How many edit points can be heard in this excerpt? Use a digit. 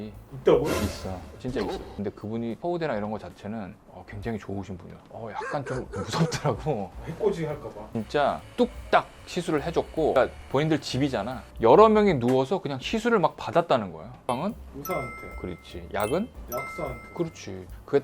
4